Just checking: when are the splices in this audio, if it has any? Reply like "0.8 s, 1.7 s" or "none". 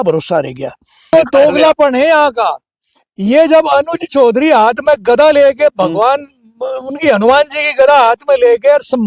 1.1 s